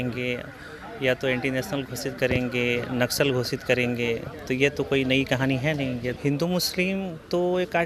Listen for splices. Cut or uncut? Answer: cut